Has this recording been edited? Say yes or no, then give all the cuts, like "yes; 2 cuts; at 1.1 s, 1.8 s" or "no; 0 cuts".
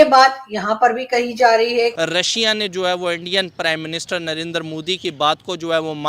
yes; 1 cut; at 1.9 s